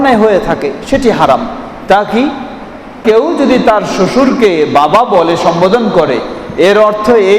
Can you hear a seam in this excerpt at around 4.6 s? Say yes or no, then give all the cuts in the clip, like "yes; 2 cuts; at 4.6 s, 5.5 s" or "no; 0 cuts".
no; 1 cut; at 3.0 s